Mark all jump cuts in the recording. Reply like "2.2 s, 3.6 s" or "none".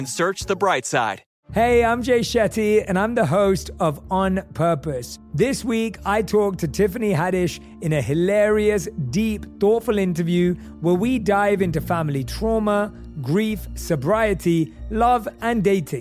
1.3 s